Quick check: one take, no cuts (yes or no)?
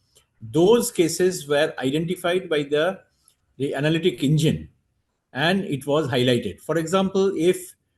yes